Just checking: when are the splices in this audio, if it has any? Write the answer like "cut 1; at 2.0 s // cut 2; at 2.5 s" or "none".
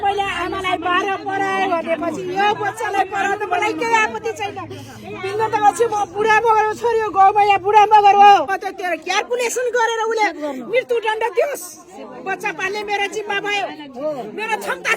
cut 1; at 8.6 s